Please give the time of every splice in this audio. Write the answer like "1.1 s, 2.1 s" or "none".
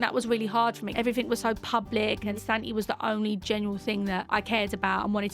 0.8 s, 2.4 s, 4.2 s